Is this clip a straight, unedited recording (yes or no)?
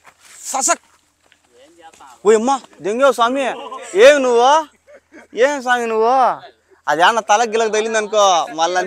yes